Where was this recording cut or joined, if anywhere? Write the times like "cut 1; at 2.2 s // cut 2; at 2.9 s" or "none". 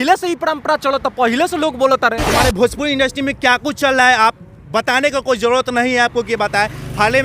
cut 1; at 2.3 s